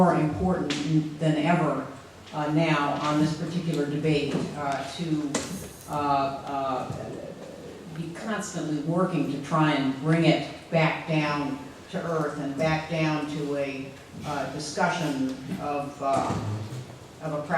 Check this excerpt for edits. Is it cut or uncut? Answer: cut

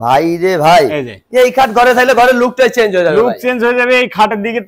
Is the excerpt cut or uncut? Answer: uncut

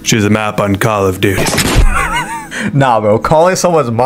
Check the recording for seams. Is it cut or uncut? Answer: cut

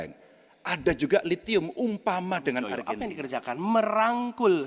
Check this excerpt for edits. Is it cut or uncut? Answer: cut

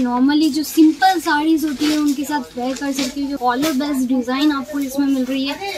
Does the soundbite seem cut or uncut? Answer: cut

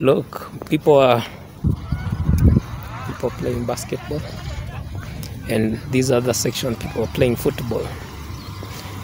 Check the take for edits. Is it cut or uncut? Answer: cut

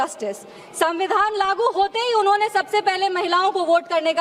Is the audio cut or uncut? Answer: uncut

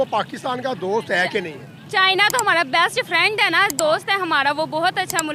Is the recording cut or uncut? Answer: uncut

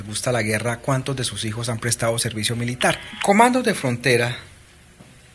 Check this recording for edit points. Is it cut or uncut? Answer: cut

